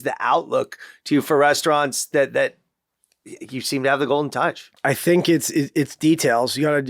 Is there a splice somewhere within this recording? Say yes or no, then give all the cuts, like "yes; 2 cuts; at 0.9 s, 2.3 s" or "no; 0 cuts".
yes; 1 cut; at 4.7 s